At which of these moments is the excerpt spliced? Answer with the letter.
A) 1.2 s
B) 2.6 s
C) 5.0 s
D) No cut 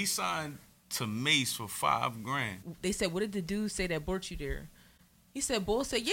B